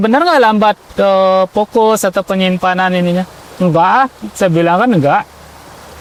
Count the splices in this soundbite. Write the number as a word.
zero